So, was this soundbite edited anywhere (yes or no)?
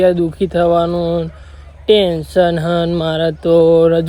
no